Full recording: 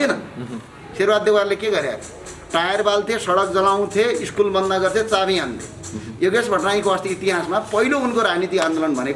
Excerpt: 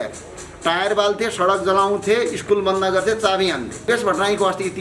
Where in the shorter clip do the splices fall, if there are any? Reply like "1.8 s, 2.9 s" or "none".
3.9 s